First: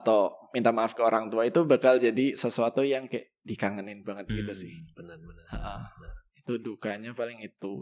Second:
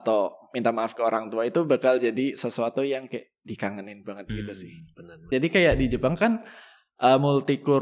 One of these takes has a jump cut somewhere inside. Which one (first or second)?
second